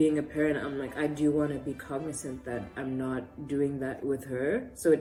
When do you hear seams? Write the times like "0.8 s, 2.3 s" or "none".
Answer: none